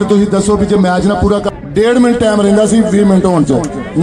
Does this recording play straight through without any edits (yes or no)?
no